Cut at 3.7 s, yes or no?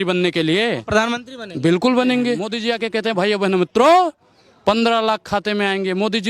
no